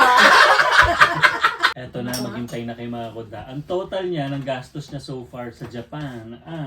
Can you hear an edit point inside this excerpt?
yes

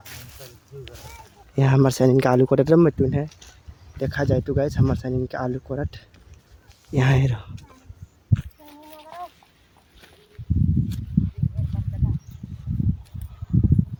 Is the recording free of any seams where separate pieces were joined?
yes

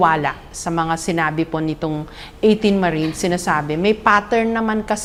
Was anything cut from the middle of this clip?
no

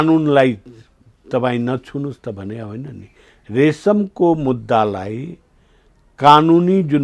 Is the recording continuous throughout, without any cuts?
yes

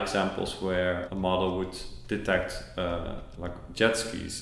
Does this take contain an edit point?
yes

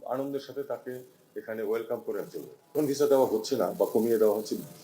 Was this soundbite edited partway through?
yes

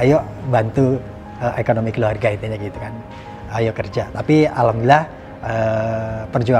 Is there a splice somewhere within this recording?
no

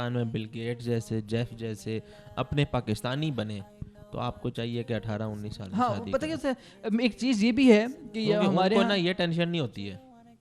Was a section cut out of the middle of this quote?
no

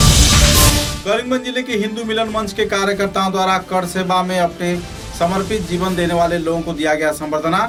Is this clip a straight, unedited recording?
yes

